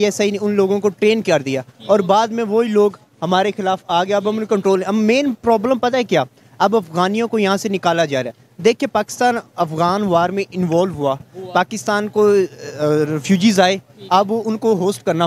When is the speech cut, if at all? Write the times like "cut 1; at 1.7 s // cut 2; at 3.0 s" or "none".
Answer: none